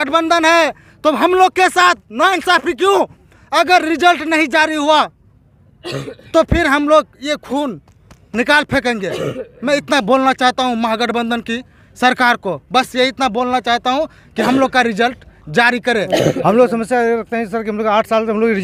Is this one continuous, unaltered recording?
yes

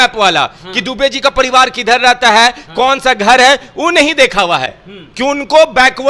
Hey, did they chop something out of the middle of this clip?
yes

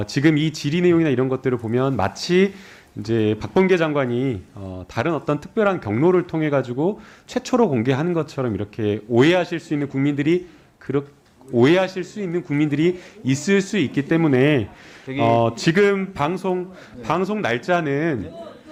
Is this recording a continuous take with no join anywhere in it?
yes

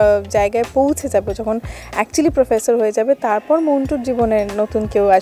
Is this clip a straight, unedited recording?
yes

